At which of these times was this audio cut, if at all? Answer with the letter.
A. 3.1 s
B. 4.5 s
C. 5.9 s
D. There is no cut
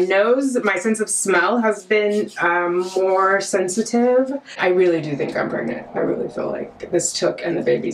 B